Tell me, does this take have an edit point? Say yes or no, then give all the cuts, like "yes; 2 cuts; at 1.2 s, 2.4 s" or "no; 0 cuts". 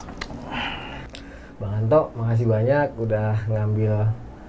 yes; 1 cut; at 1.1 s